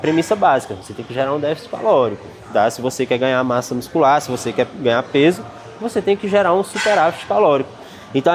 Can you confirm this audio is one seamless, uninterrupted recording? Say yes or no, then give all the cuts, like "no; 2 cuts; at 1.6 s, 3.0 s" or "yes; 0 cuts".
yes; 0 cuts